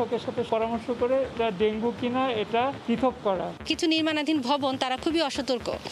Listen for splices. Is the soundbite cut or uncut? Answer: cut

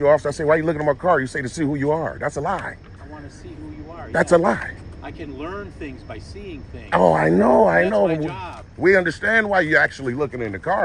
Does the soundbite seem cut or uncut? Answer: uncut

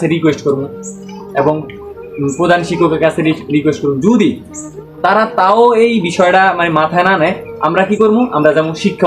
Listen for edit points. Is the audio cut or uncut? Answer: uncut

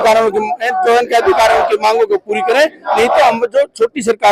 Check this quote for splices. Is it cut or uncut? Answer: uncut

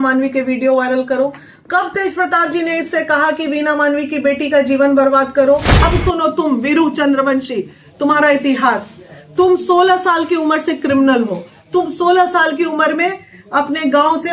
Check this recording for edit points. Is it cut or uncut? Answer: cut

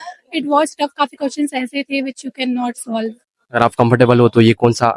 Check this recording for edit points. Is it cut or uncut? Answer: uncut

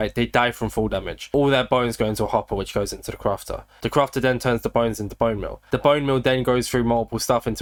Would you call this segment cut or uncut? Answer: uncut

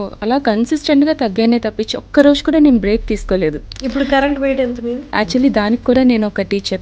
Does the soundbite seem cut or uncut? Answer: cut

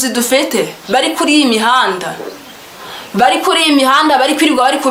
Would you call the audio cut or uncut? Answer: uncut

